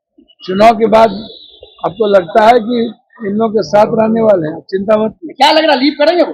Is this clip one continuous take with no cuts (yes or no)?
yes